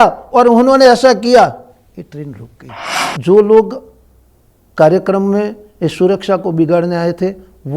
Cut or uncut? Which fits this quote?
cut